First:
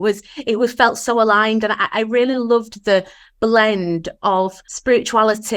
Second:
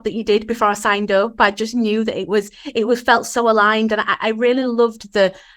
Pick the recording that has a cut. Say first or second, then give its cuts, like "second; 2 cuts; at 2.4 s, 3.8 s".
first; 1 cut; at 4.7 s